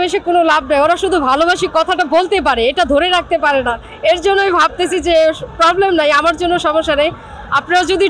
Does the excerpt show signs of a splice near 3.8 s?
no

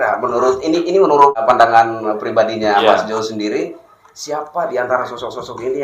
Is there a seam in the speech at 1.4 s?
yes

